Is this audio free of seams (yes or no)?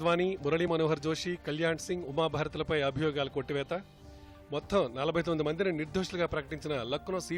yes